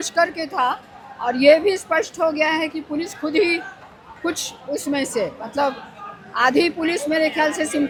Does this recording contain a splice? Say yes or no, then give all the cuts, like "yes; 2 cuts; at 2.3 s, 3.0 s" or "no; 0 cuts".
no; 0 cuts